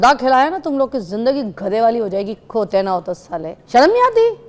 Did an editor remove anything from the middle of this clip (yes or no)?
yes